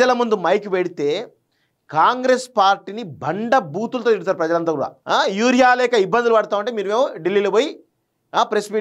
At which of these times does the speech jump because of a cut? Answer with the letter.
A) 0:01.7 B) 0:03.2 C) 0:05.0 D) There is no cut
C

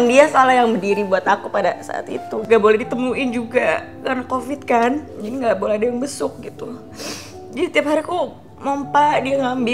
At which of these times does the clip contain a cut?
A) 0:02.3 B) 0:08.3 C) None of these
A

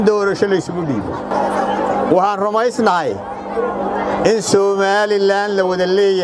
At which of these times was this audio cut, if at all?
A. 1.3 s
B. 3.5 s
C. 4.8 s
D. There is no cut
A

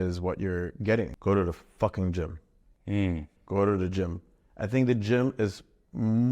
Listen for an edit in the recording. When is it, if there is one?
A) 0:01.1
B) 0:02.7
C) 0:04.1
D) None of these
A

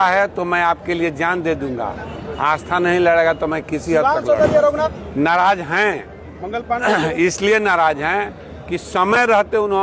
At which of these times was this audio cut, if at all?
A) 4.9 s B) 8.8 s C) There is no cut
A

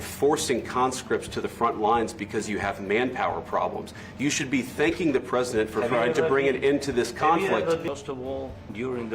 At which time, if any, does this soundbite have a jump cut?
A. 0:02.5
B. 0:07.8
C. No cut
B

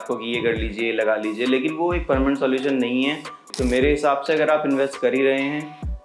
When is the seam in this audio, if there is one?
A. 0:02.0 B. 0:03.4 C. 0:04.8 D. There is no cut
B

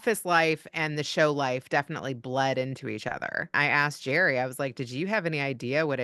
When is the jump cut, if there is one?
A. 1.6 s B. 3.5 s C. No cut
B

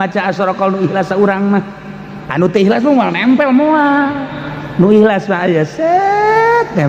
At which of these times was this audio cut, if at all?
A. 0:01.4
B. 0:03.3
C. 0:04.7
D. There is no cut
D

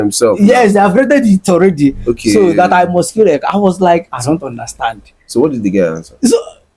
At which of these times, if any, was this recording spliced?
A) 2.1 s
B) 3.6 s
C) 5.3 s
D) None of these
D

